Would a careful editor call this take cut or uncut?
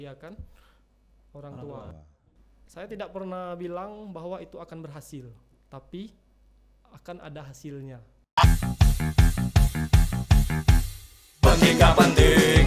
cut